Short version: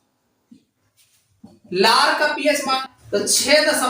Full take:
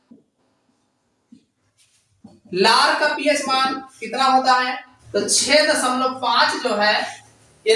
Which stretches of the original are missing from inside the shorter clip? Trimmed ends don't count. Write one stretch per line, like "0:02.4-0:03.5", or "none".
0:03.7-0:04.9